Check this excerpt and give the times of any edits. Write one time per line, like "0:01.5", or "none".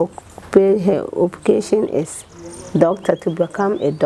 none